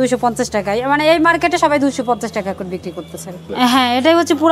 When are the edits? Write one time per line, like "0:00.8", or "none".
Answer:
0:03.4